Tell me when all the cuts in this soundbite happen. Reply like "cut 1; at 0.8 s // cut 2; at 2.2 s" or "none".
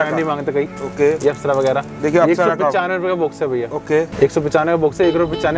cut 1; at 4.1 s